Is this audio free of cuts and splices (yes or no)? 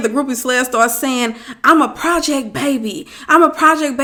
yes